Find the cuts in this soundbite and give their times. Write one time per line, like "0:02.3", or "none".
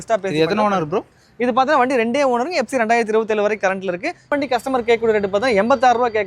0:04.3